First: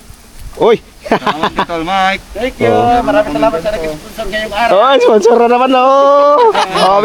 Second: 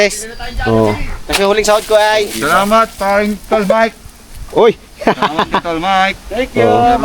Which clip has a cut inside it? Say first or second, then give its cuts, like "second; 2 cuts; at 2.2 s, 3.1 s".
second; 1 cut; at 2.4 s